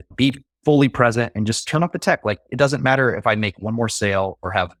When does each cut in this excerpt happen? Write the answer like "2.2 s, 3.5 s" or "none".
none